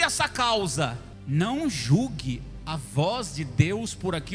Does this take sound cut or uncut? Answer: cut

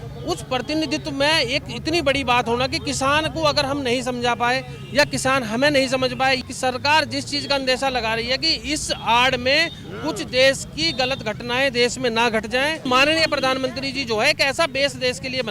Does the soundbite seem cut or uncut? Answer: cut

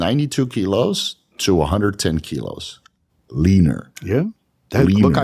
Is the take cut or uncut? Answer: cut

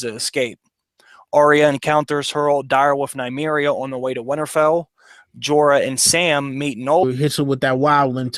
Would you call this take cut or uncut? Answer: uncut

